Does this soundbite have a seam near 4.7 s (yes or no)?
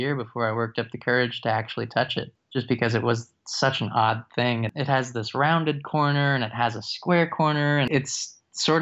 yes